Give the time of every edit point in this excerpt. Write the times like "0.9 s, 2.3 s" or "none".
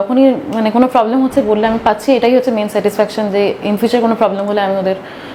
none